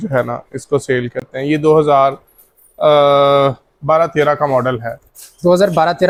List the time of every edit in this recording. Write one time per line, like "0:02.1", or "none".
none